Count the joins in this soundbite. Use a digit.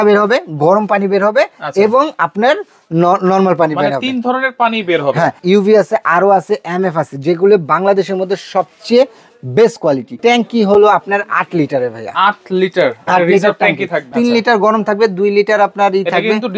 3